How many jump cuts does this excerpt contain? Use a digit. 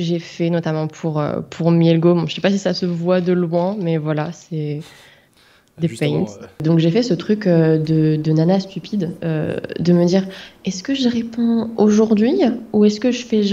1